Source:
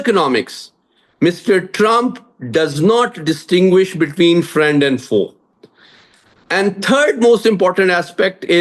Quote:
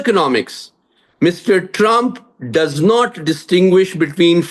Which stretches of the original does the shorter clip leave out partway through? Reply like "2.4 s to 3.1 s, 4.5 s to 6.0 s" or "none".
none

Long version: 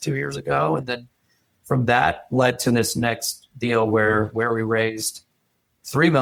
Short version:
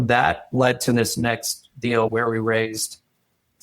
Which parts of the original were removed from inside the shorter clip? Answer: 3.9 s to 4.3 s

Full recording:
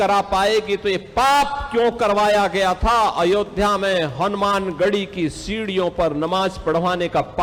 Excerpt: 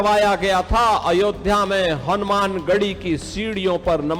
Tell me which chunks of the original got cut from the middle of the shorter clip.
none

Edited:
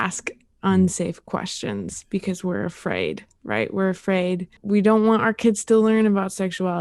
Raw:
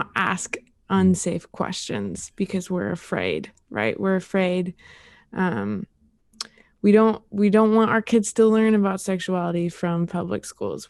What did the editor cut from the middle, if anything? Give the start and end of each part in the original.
4.8 s to 7.3 s

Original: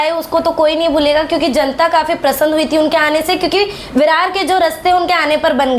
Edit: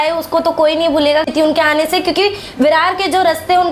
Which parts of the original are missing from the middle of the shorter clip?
1.3 s to 2.6 s

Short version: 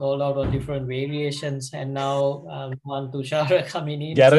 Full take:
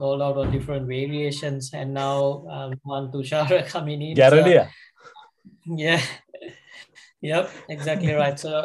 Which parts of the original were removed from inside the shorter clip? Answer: none

